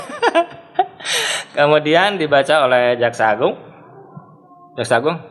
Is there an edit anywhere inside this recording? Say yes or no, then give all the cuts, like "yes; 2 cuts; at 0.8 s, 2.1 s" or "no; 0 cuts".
no; 0 cuts